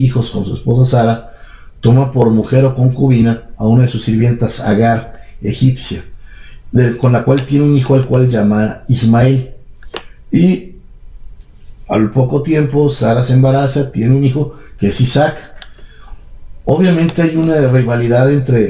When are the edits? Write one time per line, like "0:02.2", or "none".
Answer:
none